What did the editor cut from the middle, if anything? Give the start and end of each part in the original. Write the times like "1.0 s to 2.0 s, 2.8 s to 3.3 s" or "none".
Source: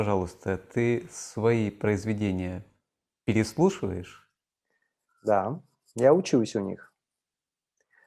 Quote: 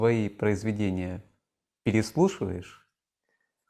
none